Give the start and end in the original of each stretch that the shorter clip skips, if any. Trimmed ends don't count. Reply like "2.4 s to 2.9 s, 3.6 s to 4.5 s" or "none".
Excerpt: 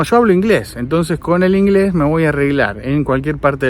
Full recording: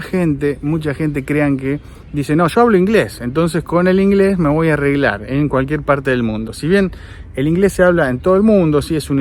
none